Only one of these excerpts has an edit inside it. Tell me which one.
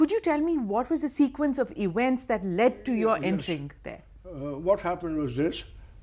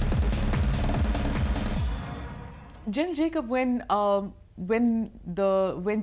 second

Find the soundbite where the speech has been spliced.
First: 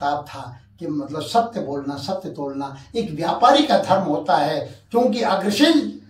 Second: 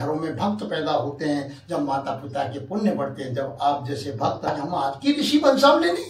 second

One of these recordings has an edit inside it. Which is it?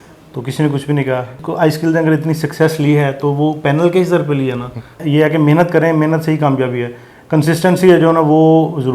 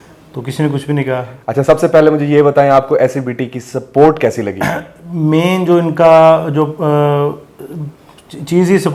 first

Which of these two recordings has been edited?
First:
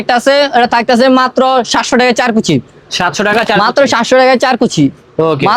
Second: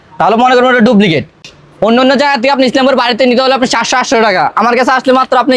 second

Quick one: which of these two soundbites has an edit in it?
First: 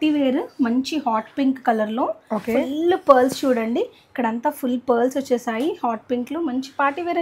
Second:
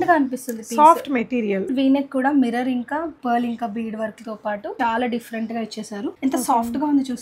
second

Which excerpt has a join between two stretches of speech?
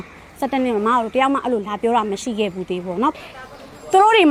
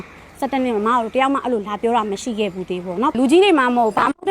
second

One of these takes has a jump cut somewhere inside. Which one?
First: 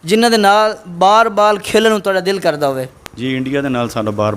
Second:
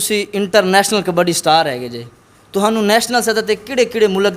first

